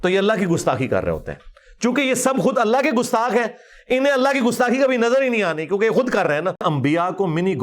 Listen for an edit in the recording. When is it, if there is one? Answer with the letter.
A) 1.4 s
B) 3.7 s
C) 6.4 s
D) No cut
C